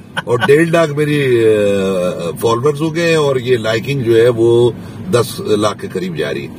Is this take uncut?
yes; 0 cuts

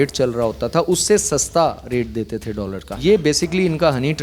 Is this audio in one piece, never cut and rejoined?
no; 1 cut; at 3.0 s

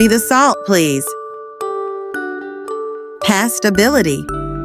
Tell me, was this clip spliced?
yes; 2 cuts; at 1.0 s, 3.3 s

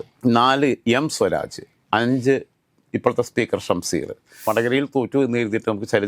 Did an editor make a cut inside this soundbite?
yes; 1 cut; at 4.5 s

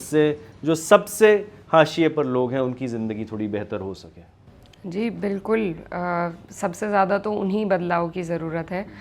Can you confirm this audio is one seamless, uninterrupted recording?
yes; 0 cuts

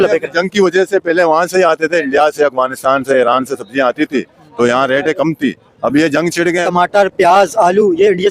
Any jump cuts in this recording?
yes; 1 cut; at 6.7 s

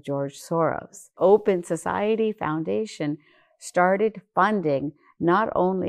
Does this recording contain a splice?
yes; 1 cut; at 1.1 s

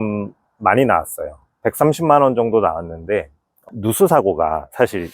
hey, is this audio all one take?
no; 1 cut; at 3.6 s

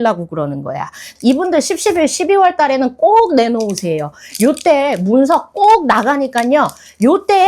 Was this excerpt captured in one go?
no; 1 cut; at 1.0 s

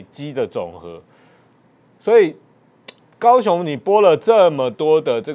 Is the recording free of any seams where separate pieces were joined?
yes; 0 cuts

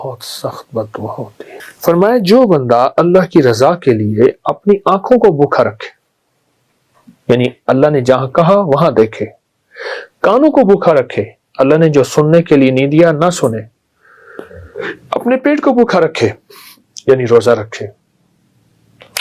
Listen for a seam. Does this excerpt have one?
yes; 1 cut; at 1.1 s

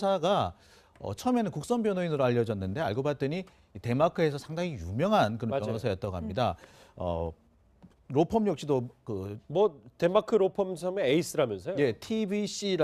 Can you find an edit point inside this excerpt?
no; 0 cuts

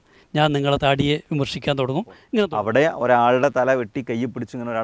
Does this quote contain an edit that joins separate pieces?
yes; 1 cut; at 2.2 s

